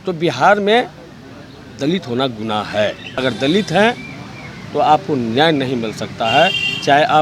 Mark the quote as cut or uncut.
cut